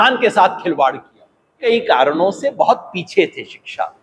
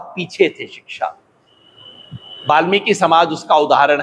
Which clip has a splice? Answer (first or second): first